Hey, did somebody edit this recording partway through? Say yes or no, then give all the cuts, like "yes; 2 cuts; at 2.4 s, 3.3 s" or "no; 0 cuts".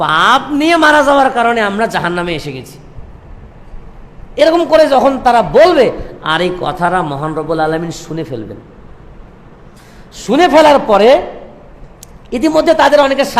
no; 0 cuts